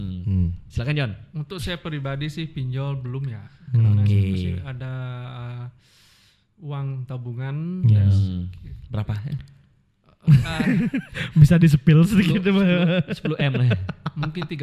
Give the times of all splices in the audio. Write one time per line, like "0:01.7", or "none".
none